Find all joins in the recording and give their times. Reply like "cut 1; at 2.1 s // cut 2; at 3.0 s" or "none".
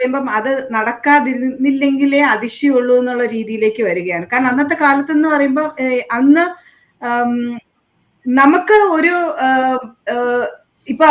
none